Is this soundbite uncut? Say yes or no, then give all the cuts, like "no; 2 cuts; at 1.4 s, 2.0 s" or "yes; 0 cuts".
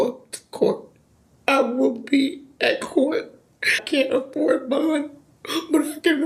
yes; 0 cuts